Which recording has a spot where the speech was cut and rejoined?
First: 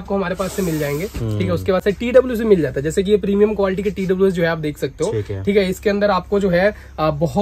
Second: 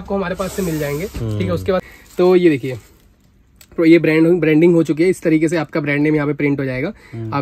second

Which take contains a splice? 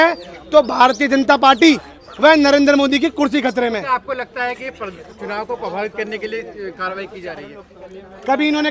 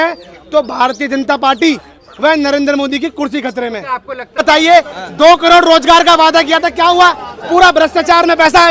second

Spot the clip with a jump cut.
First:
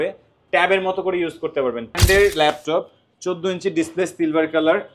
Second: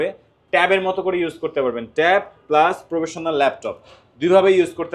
first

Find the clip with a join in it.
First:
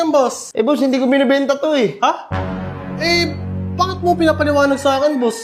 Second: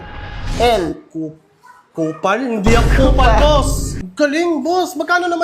second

